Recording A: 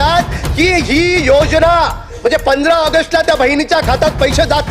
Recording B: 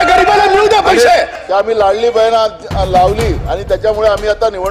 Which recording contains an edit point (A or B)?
B